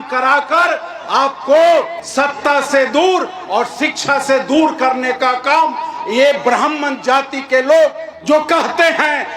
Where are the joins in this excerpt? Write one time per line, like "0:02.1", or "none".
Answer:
none